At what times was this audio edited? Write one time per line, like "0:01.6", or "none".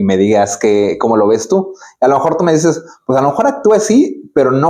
none

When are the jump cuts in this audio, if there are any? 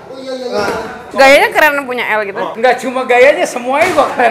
0:01.0
0:02.5

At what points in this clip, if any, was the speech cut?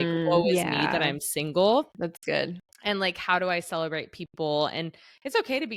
none

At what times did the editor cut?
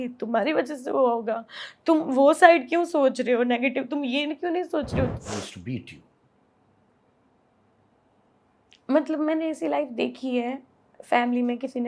0:05.1

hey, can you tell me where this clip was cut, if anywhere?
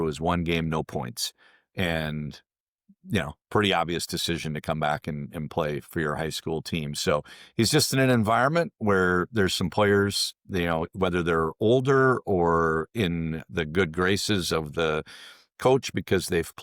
none

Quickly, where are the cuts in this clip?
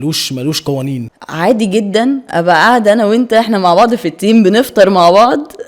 0:01.1

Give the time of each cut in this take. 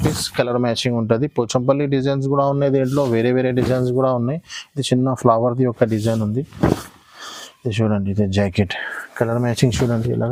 none

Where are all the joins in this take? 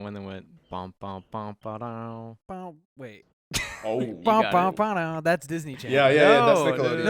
0:02.4

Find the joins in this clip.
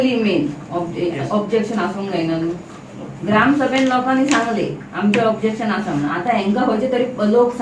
none

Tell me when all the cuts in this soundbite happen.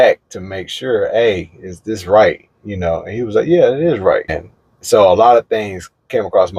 0:04.4

